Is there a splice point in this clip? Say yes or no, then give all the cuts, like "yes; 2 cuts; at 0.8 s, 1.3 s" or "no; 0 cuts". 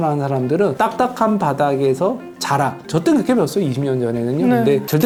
no; 0 cuts